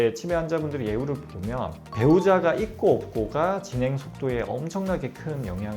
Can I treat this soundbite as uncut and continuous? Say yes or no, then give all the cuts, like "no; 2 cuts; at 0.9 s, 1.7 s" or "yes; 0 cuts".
yes; 0 cuts